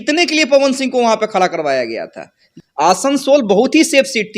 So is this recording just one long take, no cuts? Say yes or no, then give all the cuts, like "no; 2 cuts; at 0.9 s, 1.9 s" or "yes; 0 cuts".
no; 1 cut; at 2.4 s